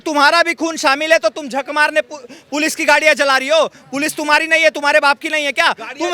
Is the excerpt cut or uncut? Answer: uncut